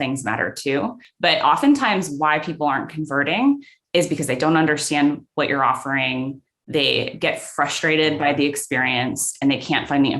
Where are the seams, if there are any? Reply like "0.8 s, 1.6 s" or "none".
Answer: 1.0 s